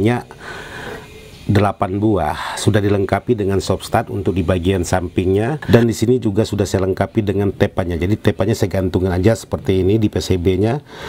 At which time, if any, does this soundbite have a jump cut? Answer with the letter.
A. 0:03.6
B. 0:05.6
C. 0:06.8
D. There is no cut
B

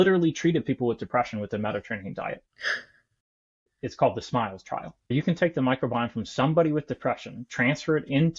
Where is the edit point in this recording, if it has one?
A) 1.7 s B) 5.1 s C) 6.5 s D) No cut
B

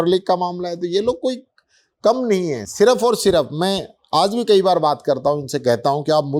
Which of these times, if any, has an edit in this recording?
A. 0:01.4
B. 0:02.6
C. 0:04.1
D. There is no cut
D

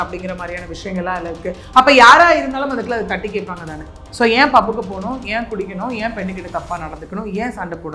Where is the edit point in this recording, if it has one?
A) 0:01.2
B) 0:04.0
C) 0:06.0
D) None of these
B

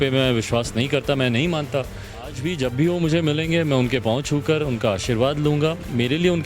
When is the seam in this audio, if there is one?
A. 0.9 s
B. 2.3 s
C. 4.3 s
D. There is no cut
B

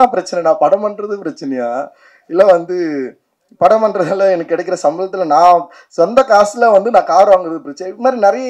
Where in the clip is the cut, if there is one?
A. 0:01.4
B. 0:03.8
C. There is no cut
C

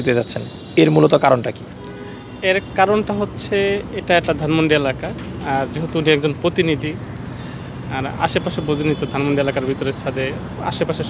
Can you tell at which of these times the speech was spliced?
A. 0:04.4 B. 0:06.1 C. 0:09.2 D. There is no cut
D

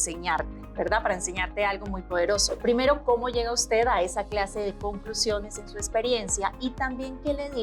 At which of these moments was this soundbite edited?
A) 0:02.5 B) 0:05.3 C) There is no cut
A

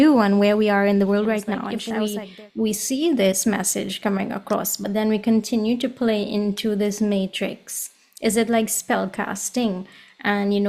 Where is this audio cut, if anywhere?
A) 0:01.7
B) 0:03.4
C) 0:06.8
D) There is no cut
A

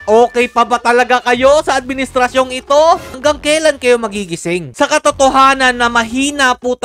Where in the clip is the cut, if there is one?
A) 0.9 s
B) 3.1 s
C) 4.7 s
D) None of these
B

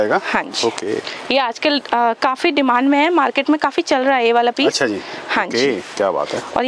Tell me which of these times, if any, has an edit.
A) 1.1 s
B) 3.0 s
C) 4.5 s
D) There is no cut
A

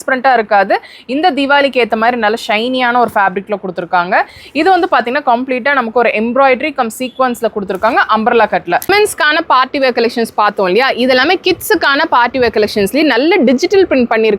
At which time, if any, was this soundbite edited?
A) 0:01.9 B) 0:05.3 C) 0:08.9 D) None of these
C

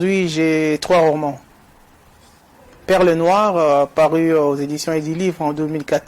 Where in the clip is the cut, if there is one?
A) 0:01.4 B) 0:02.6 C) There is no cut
C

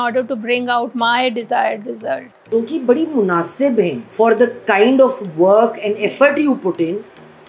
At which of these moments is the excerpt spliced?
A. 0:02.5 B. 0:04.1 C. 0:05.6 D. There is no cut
A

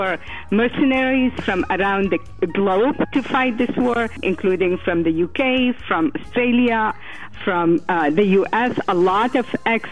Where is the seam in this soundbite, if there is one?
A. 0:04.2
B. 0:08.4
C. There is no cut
A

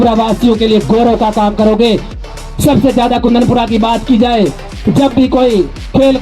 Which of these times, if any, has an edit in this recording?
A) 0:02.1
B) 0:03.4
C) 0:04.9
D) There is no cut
A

